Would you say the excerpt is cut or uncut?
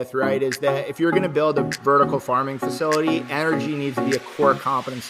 uncut